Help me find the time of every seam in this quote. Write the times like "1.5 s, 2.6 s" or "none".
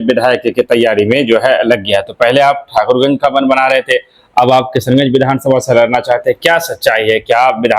none